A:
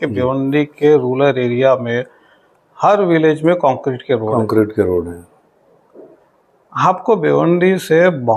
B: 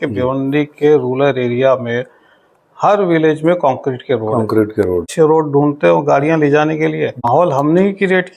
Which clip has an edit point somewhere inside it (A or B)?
B